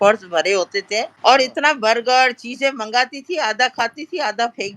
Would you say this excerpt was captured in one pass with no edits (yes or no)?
no